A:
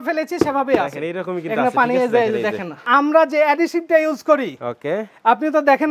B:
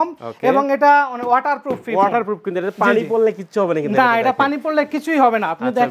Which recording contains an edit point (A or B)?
A